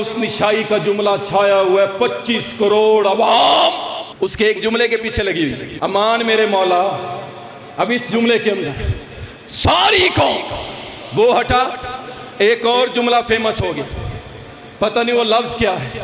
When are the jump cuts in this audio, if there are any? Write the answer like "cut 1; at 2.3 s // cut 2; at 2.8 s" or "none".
cut 1; at 4.0 s // cut 2; at 5.7 s